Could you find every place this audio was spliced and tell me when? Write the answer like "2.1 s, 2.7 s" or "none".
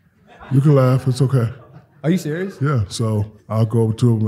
3.4 s

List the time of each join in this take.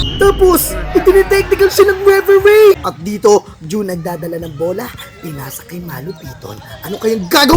2.9 s

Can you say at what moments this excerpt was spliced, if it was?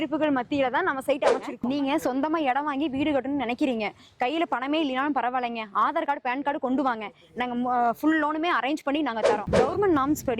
1.5 s, 9.4 s

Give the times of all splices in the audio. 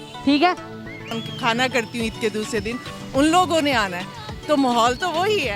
1.1 s

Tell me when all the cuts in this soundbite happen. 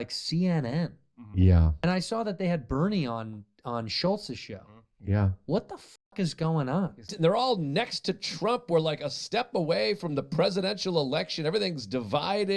7.1 s

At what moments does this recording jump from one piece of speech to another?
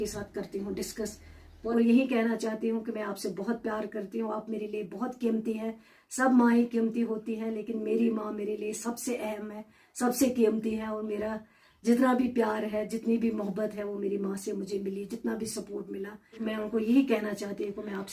1.5 s, 16.4 s

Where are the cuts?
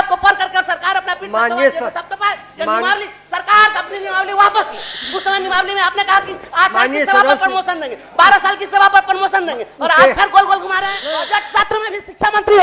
5.0 s, 11.1 s

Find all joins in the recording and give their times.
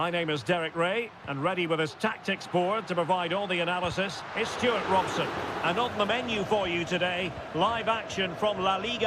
5.4 s

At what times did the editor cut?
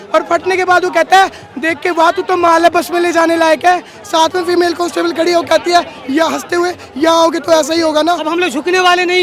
8.2 s

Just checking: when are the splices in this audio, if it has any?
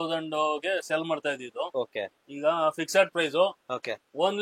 none

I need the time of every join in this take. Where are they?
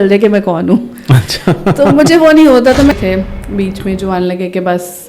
2.9 s

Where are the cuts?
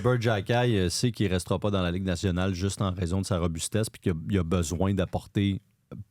none

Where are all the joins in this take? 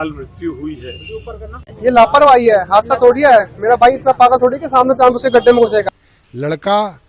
1.7 s, 5.8 s

